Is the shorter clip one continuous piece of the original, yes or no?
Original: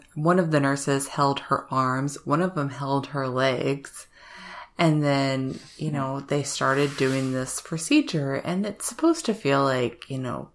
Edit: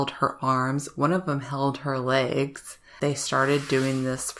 no